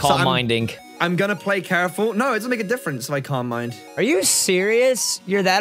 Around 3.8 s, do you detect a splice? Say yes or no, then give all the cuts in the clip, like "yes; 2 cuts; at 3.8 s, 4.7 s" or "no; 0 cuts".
yes; 1 cut; at 3.8 s